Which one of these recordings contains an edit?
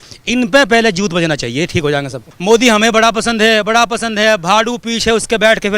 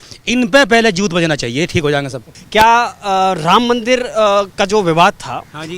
first; 1 cut; at 2.3 s

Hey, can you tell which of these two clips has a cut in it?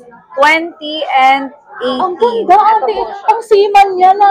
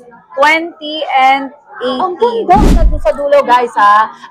second; 1 cut; at 2.7 s

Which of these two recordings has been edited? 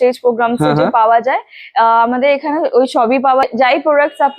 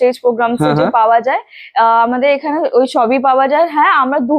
first; 1 cut; at 3.4 s

